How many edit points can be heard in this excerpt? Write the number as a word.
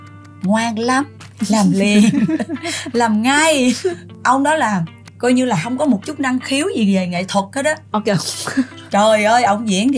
one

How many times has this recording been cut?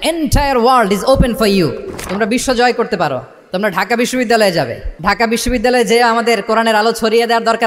one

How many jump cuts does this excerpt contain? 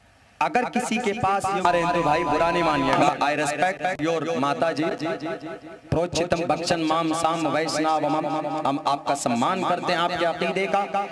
one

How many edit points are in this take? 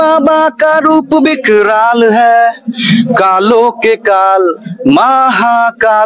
zero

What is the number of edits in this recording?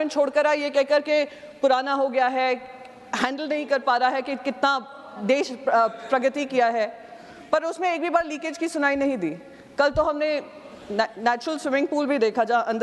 zero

